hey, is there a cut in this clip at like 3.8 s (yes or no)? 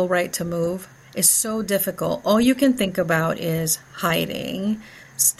no